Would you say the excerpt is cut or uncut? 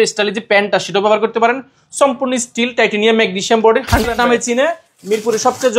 cut